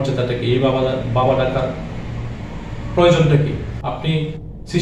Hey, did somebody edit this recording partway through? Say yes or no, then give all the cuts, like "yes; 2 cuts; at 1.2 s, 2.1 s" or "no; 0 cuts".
yes; 1 cut; at 3.7 s